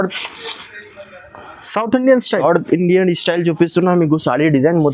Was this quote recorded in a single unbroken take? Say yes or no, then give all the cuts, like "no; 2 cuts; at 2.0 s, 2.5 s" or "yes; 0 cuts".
yes; 0 cuts